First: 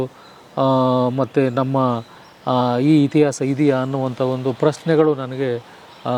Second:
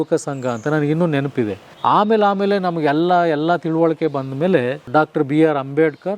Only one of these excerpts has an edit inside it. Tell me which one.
second; 2 cuts; at 1.7 s, 4.8 s

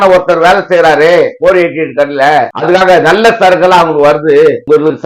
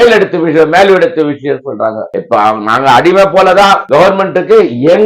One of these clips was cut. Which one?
second; 1 cut; at 2.1 s

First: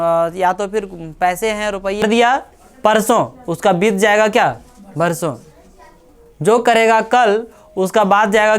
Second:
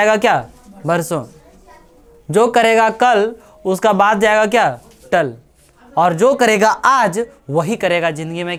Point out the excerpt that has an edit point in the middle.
first; 1 cut; at 2.0 s

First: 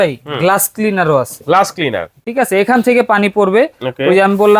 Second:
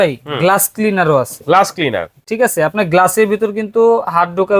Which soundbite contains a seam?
first; 1 cut; at 2.1 s

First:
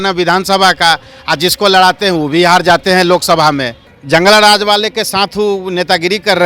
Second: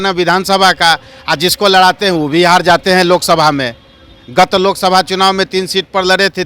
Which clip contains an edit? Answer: first; 1 cut; at 3.9 s

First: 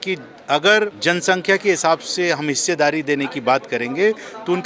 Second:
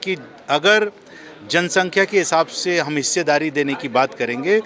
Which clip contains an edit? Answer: first; 1 cut; at 1.0 s

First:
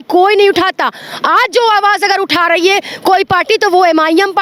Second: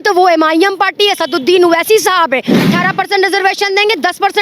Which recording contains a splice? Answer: second; 1 cut; at 2.5 s

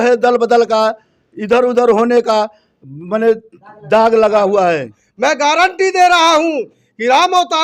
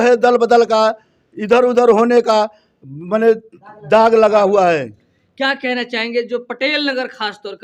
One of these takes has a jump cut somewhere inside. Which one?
first; 1 cut; at 5.0 s

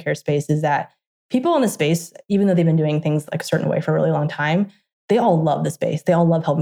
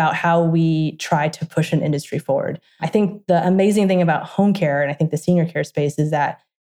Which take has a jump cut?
second; 1 cut; at 2.8 s

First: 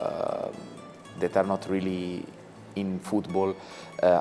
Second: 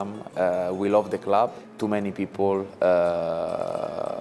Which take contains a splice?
second; 1 cut; at 1.6 s

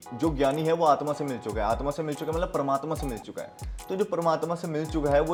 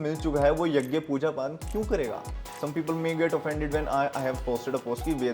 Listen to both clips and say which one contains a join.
second; 1 cut; at 2.5 s

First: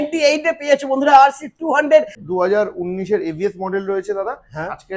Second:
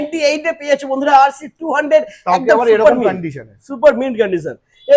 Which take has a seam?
first; 1 cut; at 2.2 s

